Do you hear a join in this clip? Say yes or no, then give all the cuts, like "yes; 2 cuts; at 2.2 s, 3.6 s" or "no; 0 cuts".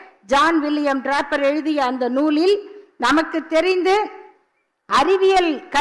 no; 0 cuts